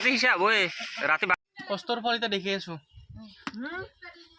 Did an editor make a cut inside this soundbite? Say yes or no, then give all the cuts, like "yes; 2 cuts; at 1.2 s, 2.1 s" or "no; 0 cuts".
yes; 1 cut; at 1.3 s